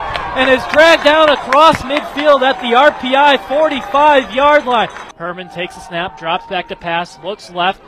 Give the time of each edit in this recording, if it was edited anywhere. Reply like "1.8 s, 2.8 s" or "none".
5.1 s